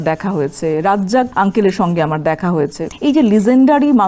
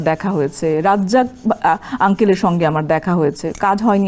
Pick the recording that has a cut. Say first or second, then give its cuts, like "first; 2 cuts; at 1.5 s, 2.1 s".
first; 2 cuts; at 1.3 s, 2.8 s